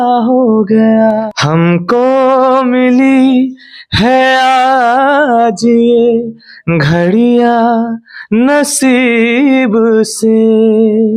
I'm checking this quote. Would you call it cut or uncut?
cut